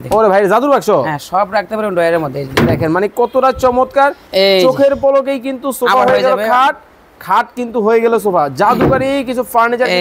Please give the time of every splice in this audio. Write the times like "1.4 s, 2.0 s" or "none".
4.2 s